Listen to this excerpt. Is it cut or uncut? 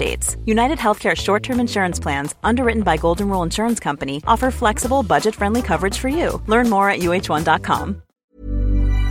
cut